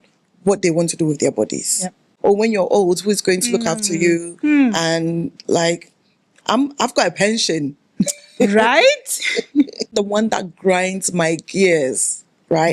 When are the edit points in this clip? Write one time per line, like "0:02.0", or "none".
0:02.1
0:09.9